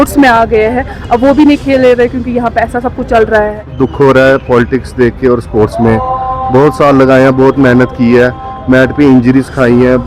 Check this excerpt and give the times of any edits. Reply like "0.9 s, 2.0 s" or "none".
3.7 s